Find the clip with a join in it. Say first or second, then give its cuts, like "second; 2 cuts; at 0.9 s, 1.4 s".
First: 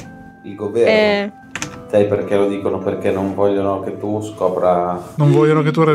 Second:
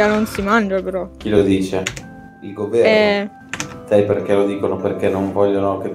first; 1 cut; at 5.0 s